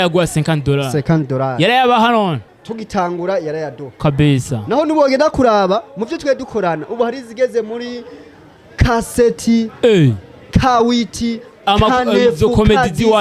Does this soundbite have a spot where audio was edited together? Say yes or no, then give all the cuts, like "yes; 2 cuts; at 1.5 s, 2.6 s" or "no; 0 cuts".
yes; 1 cut; at 2.4 s